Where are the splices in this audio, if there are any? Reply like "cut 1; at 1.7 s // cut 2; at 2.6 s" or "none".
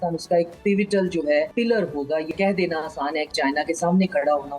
cut 1; at 1.5 s // cut 2; at 2.3 s // cut 3; at 3.3 s